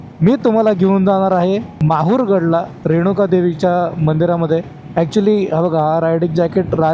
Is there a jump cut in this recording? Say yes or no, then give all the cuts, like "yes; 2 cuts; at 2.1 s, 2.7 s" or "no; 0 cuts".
yes; 3 cuts; at 1.7 s, 2.7 s, 4.8 s